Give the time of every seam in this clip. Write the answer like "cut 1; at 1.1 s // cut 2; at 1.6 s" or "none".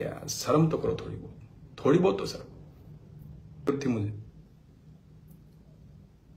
cut 1; at 3.7 s